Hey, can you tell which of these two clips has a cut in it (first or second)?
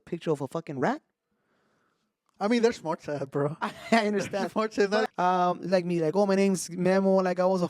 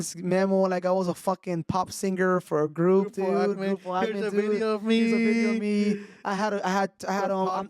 first